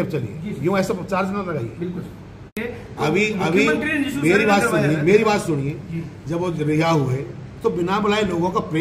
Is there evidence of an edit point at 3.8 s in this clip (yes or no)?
no